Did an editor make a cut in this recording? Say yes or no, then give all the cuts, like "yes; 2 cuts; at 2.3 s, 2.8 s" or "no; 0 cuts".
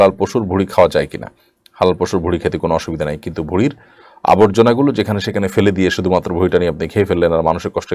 no; 0 cuts